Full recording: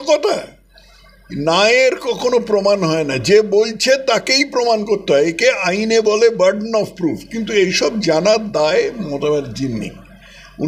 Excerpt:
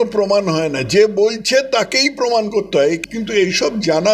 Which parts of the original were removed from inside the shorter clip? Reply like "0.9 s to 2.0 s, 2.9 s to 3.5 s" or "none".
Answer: 5.4 s to 7.2 s